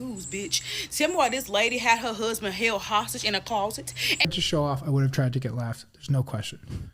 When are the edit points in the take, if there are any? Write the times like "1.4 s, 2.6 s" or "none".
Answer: 4.3 s